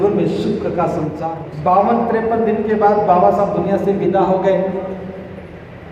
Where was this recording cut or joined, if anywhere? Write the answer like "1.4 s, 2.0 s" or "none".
1.4 s